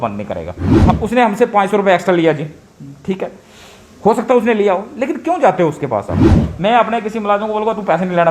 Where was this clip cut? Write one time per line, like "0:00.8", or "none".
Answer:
0:01.0
0:06.4

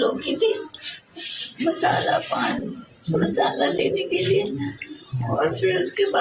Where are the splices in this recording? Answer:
none

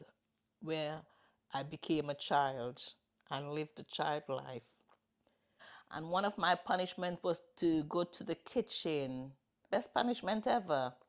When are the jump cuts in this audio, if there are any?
0:05.1
0:09.6

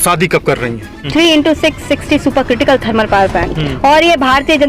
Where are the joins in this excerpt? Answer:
0:01.0

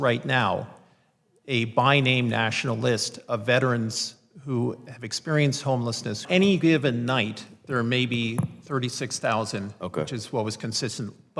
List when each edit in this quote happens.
0:06.2

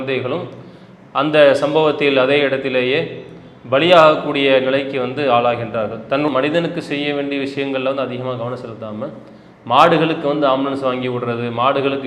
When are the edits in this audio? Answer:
0:06.3

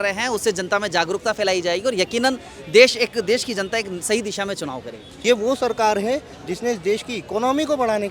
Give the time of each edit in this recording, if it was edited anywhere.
0:05.0

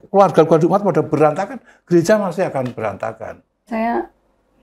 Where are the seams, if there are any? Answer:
0:03.7

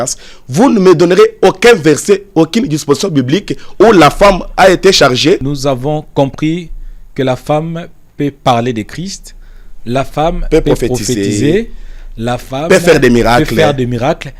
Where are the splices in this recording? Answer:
0:05.4

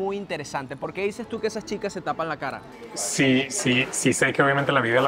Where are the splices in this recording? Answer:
0:02.7

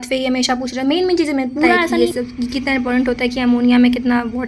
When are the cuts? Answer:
0:01.9

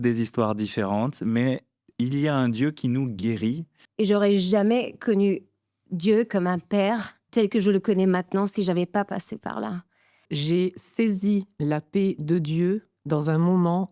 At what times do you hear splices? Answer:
0:03.8
0:07.2
0:10.3
0:12.9

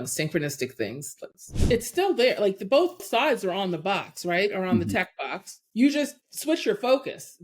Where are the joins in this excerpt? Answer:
0:01.5
0:03.0

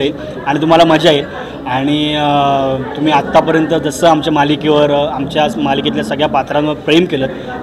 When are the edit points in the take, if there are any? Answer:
none

